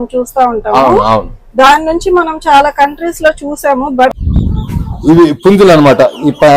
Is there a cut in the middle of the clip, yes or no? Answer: yes